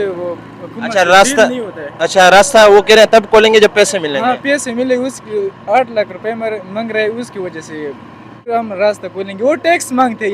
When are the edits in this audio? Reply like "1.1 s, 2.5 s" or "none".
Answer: 8.5 s

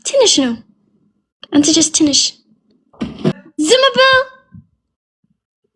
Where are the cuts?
3.4 s

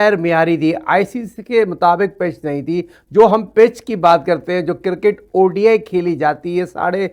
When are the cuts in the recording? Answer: none

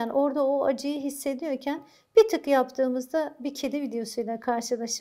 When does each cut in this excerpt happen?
none

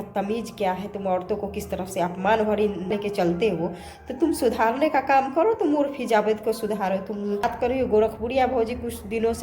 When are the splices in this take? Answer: 2.9 s, 7.4 s

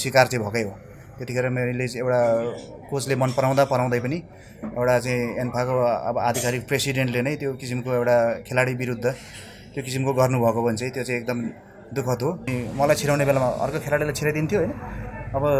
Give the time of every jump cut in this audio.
12.6 s

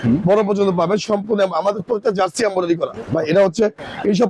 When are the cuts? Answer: 3.0 s

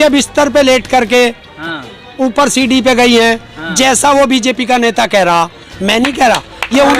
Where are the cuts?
none

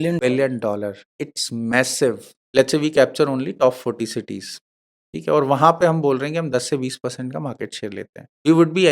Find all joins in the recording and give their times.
2.3 s

